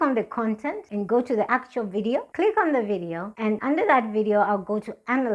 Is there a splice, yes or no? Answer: yes